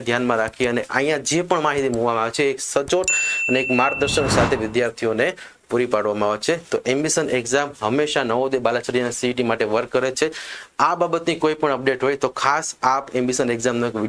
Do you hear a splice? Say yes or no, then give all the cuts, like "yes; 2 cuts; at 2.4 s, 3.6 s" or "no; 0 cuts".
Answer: no; 0 cuts